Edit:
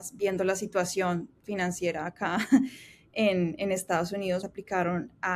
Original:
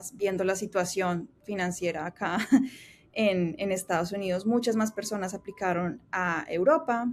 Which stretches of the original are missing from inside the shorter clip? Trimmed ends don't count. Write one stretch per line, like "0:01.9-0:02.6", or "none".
0:04.4-0:05.3